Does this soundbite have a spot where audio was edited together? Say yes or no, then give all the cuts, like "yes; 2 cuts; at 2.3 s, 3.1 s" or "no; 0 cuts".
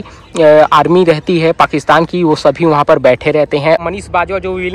yes; 1 cut; at 3.8 s